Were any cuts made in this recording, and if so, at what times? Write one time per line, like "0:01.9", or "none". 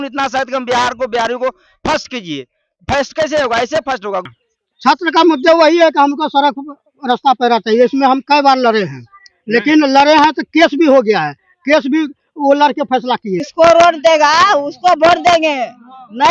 0:04.3
0:13.5